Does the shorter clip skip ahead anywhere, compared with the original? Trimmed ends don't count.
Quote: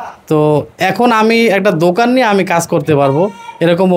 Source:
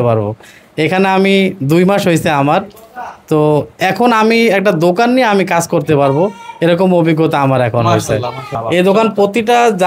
no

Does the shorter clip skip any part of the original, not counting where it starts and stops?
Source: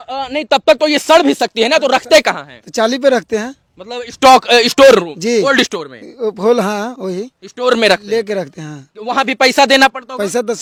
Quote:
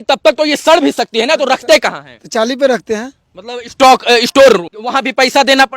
yes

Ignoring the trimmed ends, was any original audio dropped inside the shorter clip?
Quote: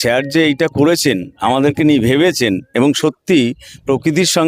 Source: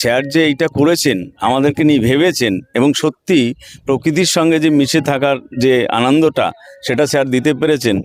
no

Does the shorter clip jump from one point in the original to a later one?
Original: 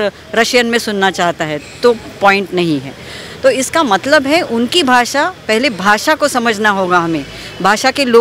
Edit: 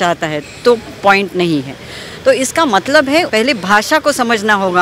yes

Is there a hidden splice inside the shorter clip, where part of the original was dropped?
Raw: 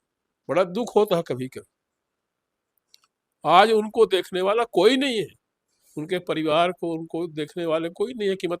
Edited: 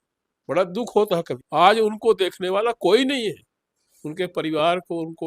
yes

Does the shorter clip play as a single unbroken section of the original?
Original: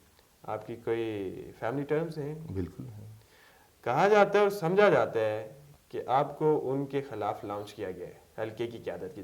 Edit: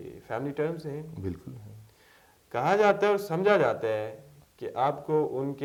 yes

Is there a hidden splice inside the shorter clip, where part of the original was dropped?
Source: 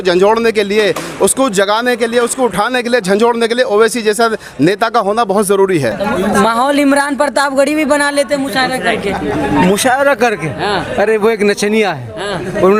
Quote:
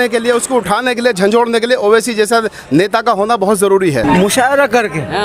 yes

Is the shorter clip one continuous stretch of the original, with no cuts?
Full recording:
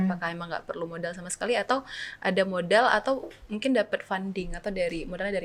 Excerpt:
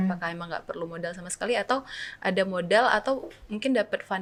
yes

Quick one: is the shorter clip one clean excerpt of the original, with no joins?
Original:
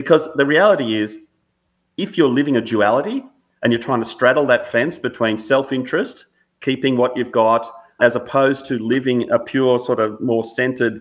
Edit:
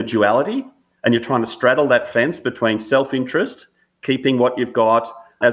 yes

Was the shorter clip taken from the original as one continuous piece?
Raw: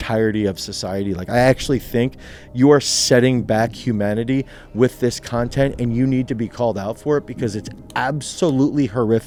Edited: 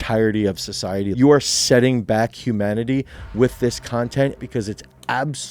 no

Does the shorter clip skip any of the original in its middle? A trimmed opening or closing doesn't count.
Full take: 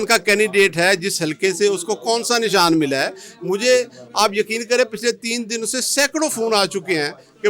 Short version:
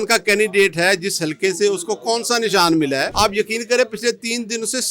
yes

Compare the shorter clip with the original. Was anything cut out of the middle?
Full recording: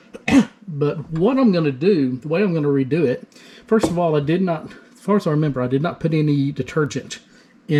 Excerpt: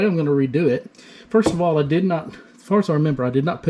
no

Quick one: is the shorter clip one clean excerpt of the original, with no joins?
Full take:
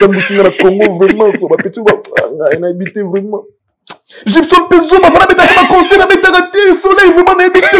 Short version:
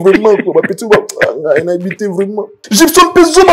no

